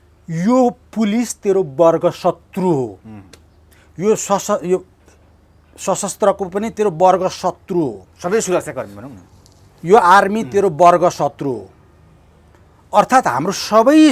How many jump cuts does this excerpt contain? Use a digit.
0